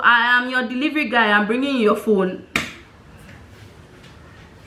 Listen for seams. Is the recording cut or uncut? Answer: uncut